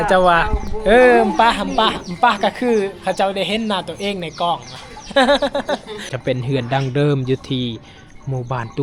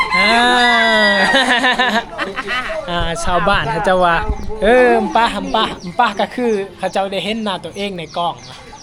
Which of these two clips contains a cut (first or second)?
first